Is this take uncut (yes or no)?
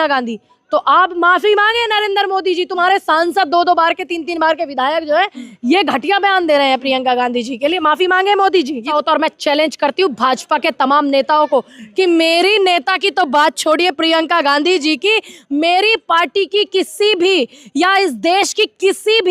no